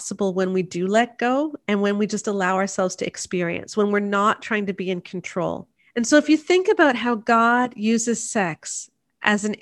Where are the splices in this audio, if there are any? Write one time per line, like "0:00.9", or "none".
0:05.7